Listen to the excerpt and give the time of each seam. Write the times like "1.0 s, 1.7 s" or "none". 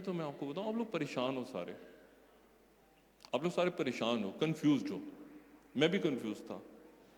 none